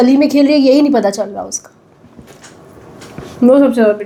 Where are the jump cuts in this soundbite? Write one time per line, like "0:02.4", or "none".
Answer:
none